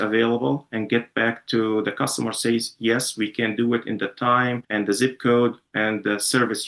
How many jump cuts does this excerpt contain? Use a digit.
1